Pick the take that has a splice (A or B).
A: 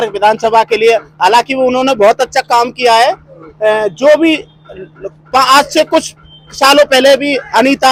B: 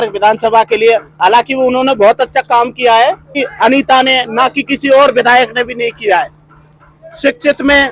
B